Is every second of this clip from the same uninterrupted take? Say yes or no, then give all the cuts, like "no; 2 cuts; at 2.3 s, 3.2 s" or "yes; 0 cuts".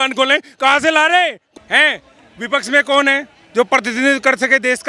no; 1 cut; at 1.4 s